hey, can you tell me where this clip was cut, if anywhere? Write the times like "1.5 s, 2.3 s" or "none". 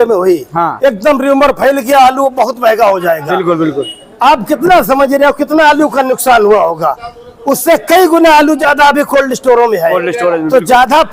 none